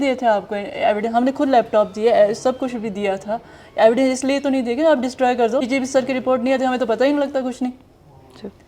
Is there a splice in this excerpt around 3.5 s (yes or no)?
no